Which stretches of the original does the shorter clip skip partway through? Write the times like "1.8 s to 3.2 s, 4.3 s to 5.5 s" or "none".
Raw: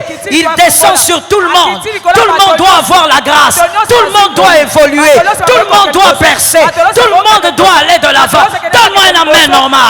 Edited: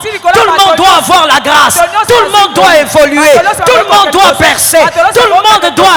none